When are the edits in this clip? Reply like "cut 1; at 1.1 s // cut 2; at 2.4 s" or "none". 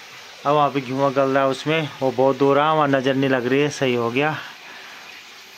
none